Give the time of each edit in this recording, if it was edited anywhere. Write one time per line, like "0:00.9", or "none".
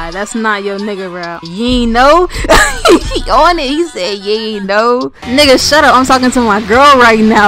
0:01.4
0:05.1